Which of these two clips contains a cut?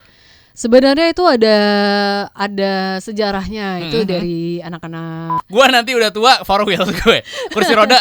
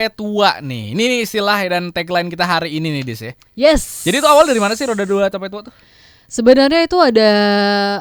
first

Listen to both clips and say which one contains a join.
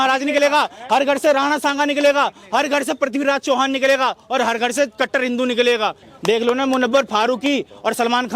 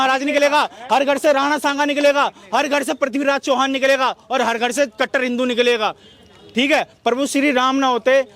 first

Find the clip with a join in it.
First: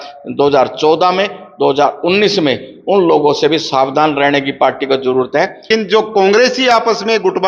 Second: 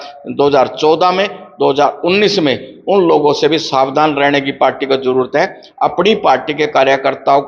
first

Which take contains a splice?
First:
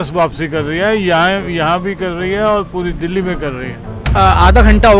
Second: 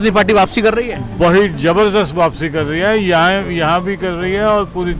first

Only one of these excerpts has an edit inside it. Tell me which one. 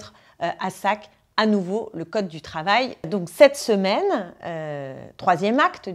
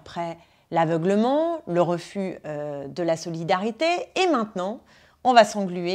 first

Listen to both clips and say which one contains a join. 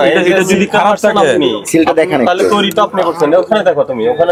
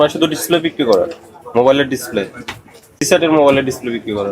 second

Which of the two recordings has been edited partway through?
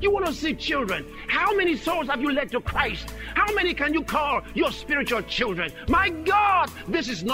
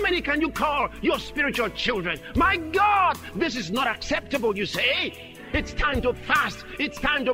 first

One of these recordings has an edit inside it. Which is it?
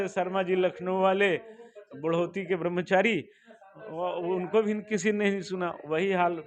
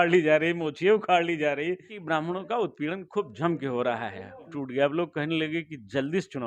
second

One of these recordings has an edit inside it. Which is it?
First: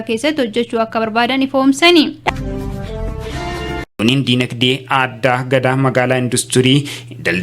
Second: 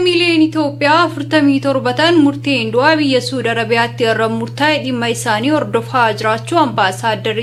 first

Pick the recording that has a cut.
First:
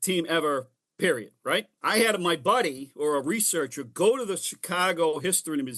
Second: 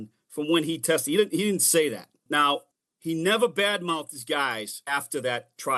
first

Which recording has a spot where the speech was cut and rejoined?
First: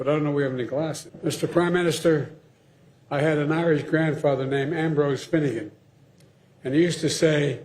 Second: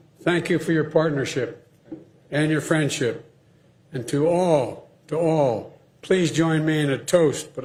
first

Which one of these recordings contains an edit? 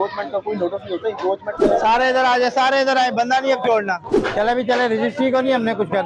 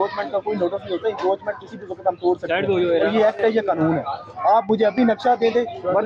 first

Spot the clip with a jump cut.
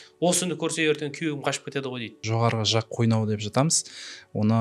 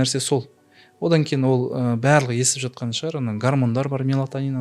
first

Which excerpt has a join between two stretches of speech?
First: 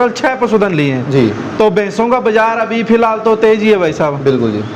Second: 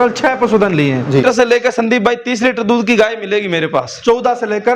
second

